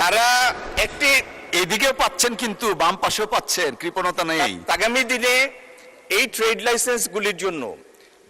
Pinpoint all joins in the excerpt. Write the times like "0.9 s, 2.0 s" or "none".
4.7 s